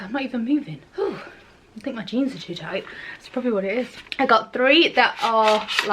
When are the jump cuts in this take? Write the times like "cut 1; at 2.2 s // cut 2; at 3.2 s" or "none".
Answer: none